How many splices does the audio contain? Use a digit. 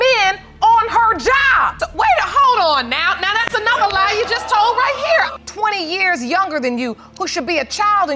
2